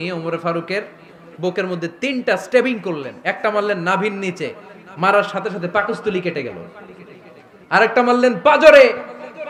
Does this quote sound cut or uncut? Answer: uncut